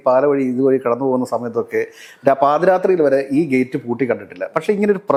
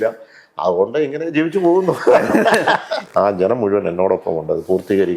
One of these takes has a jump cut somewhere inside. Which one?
second; 1 cut; at 2.9 s

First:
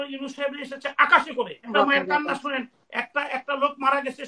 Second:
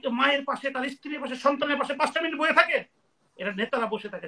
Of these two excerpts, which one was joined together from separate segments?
first; 1 cut; at 1.7 s

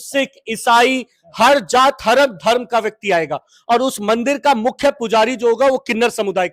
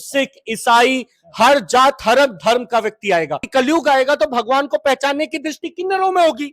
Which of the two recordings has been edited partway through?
second; 1 cut; at 3.4 s

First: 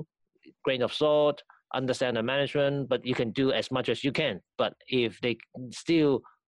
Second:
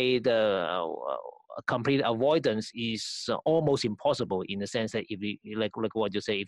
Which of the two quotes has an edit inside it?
second; 1 cut; at 2.7 s

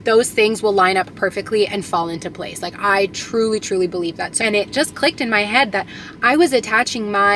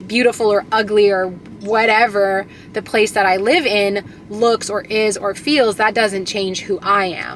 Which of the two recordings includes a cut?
first; 1 cut; at 4.3 s

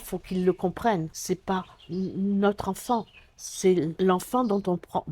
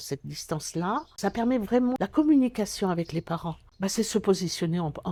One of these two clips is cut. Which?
first; 2 cuts; at 1.1 s, 3.9 s

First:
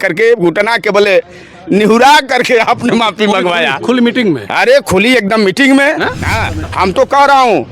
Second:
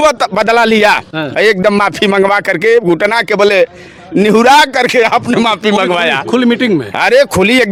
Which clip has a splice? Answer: first; 1 cut; at 6.6 s

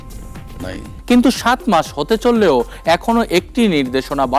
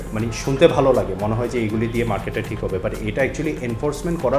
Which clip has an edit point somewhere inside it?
first; 1 cut; at 0.9 s

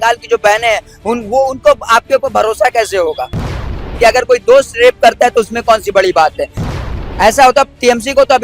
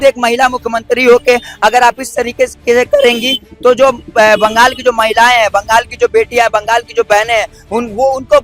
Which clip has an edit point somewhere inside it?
first; 2 cuts; at 3.6 s, 6.7 s

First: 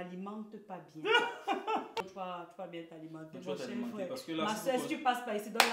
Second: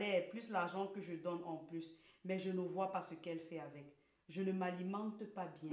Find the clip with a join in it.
first; 1 cut; at 2.0 s

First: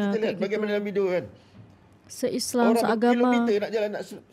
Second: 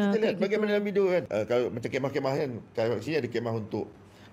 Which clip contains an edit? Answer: second; 1 cut; at 1.3 s

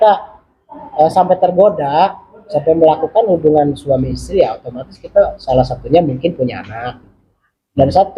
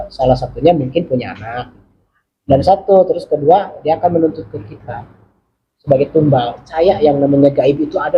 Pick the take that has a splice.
second; 1 cut; at 6.7 s

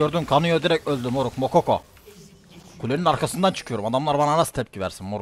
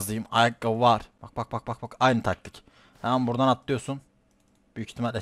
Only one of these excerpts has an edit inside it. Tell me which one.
second; 1 cut; at 1.2 s

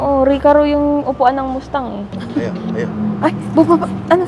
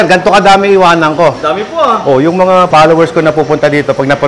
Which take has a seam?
first; 1 cut; at 2.1 s

